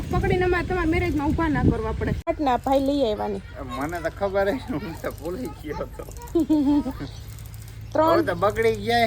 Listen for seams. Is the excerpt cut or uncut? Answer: cut